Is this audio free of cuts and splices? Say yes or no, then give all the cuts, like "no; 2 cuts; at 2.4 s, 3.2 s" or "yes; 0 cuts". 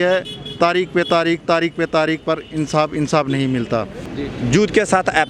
no; 1 cut; at 4.0 s